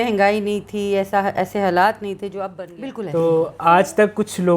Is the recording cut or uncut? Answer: cut